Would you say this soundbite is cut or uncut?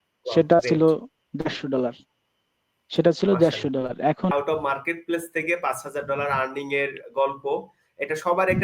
cut